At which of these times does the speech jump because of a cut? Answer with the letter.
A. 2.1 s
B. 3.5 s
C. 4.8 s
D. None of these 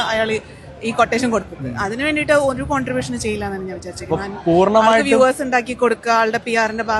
C